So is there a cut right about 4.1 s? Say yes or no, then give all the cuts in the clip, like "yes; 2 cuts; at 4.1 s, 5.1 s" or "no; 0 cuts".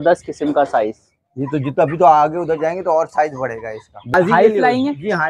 yes; 1 cut; at 4.1 s